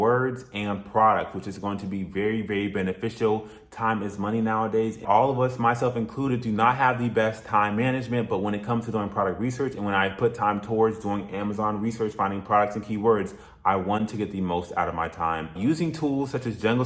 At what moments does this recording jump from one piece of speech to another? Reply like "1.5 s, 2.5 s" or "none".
5.0 s